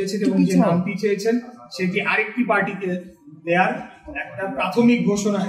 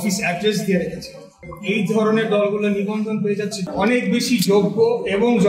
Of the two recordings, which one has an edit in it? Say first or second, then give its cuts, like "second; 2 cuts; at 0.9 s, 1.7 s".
second; 2 cuts; at 1.4 s, 3.7 s